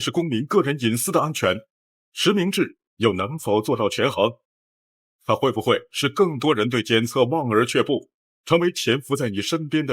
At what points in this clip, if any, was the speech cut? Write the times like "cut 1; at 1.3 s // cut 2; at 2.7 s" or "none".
none